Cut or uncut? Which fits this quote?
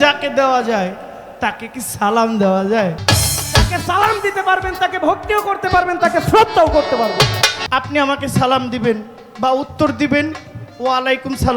cut